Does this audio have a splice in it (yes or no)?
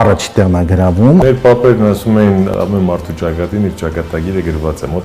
yes